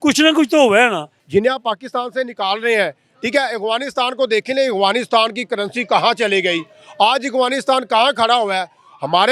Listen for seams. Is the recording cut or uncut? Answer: cut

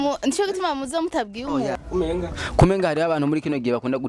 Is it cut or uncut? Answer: cut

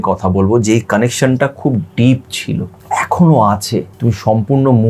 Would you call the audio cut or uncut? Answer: cut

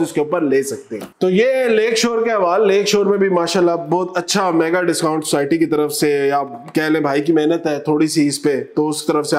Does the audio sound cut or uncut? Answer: uncut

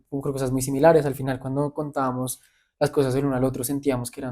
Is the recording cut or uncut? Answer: uncut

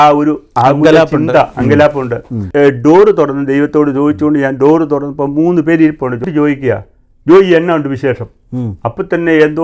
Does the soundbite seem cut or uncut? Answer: cut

